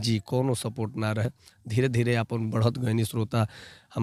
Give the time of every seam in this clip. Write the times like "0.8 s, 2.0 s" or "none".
none